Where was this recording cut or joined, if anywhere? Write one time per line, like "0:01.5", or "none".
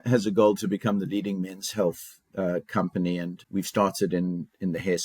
0:03.4